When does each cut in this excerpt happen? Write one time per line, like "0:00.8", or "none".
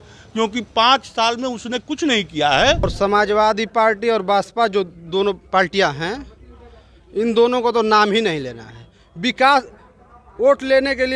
0:02.8